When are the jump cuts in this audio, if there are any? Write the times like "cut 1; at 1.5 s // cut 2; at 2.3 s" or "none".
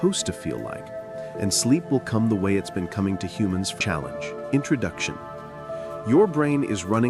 cut 1; at 3.8 s